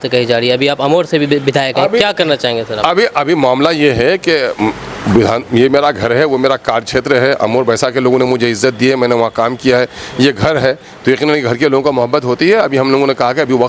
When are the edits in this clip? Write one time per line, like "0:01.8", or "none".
none